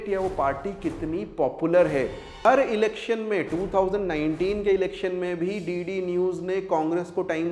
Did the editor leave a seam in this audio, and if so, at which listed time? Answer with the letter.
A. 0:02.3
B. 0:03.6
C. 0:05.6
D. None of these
A